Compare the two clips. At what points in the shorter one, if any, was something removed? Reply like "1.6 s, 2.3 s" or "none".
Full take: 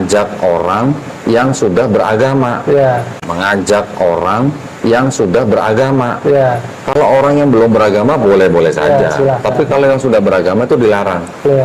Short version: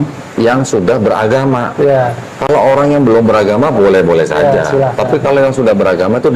2.2 s